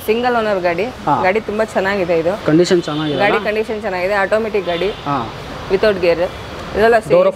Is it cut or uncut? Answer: uncut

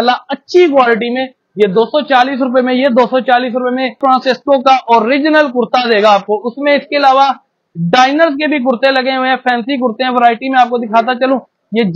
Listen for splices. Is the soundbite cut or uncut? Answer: cut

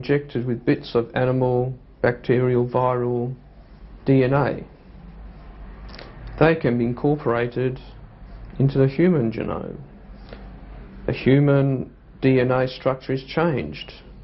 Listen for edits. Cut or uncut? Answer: uncut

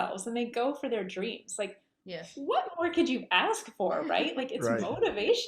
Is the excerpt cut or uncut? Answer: uncut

